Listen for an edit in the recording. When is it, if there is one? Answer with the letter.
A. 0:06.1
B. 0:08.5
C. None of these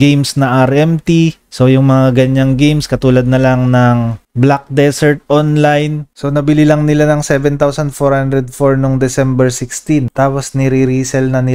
A